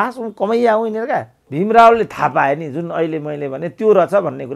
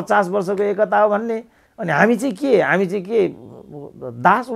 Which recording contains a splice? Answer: first; 1 cut; at 1.4 s

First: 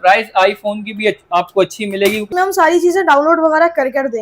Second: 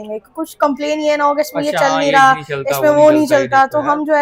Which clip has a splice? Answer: first; 1 cut; at 2.3 s

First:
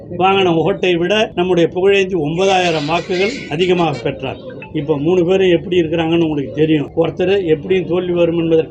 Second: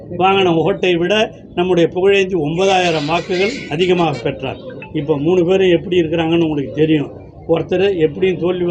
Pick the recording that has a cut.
first; 2 cuts; at 1.3 s, 6.9 s

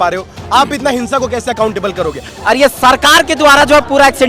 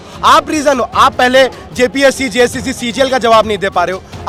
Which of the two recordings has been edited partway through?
first; 1 cut; at 2.3 s

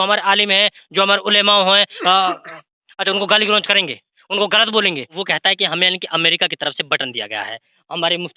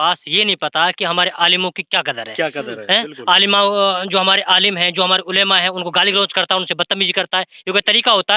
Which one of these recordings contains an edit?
first; 1 cut; at 5.2 s

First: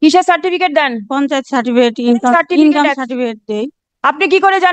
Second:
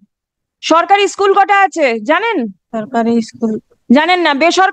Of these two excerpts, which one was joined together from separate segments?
second; 1 cut; at 2.6 s

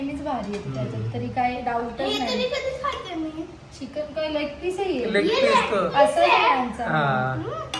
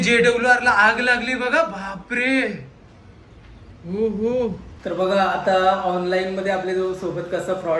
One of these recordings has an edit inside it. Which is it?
second; 1 cut; at 4.7 s

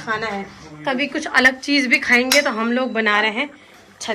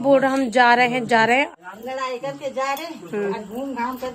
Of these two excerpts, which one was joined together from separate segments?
second; 1 cut; at 1.5 s

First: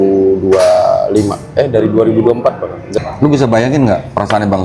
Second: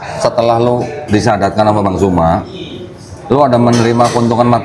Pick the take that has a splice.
first; 1 cut; at 3.0 s

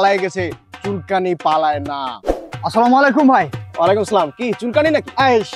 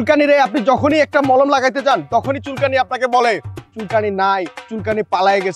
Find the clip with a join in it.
first; 1 cut; at 2.1 s

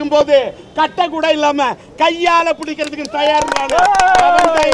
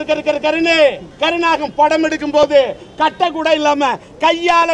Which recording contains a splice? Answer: second; 1 cut; at 1.1 s

